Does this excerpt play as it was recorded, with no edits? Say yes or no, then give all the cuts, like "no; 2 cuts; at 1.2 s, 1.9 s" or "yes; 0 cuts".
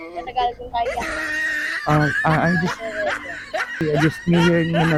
yes; 0 cuts